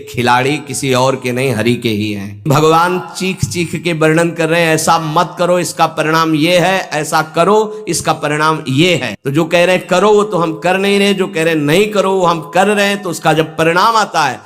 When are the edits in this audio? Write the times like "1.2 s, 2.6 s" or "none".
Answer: 2.4 s, 9.2 s